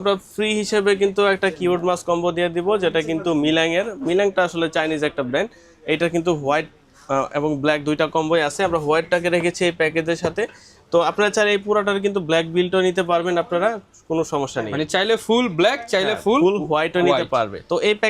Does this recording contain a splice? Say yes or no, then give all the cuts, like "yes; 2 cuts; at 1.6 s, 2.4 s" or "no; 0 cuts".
no; 0 cuts